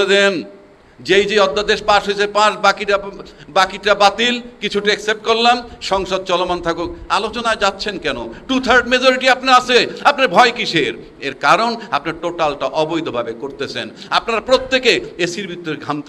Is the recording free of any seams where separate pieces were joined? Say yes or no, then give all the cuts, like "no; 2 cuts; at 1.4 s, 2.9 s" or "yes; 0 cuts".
yes; 0 cuts